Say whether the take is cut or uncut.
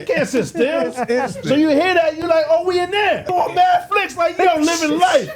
cut